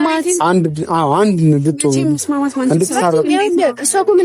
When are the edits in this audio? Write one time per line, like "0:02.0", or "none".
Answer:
none